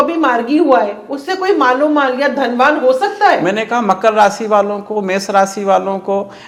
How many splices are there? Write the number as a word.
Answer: zero